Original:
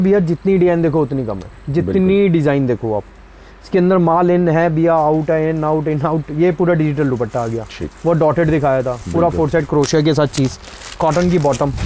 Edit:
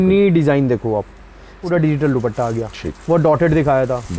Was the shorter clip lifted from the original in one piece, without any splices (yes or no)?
no